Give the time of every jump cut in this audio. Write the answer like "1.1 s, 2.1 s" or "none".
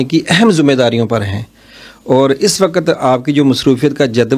none